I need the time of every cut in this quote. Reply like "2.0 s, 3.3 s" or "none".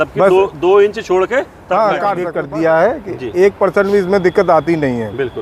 2.3 s